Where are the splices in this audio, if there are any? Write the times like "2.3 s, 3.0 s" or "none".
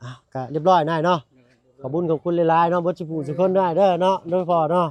none